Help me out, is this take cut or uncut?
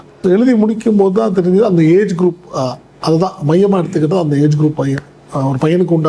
uncut